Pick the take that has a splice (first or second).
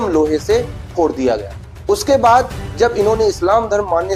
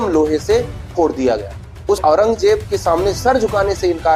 second